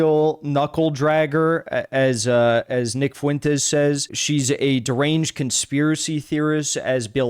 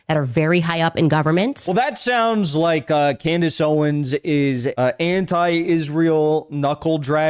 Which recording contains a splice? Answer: second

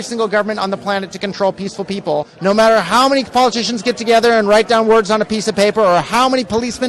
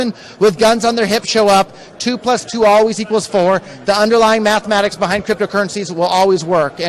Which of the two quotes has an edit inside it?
first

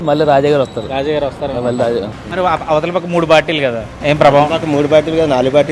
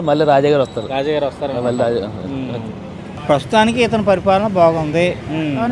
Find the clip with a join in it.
first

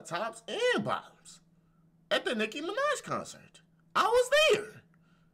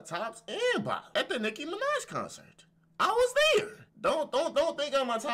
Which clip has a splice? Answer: second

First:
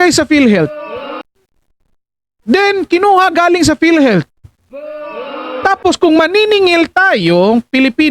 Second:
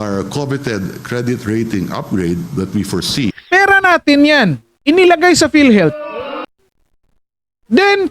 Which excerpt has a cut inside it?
second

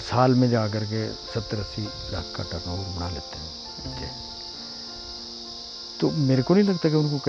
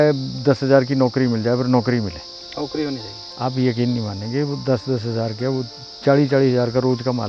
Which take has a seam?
second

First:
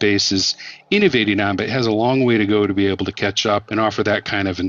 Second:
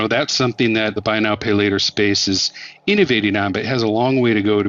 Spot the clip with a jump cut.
first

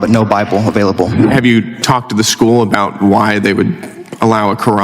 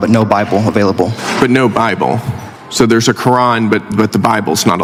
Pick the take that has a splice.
first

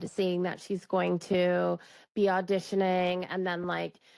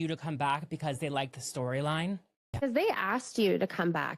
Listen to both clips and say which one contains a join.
second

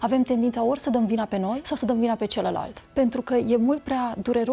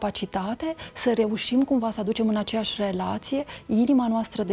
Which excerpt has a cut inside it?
first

